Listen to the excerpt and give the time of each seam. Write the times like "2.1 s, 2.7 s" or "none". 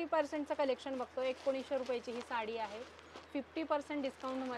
none